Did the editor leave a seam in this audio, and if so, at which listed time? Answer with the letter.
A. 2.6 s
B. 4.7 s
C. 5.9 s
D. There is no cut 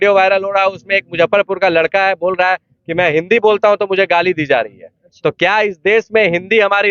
D